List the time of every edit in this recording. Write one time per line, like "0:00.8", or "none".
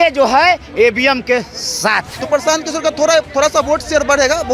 0:02.1